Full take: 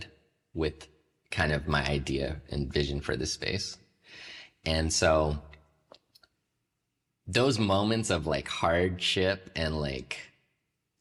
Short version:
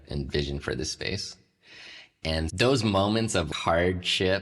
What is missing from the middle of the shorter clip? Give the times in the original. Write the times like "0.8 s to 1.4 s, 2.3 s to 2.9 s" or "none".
4.9 s to 7.3 s, 8.2 s to 8.4 s